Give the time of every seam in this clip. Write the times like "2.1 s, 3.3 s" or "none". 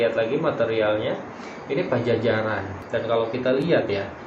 2.7 s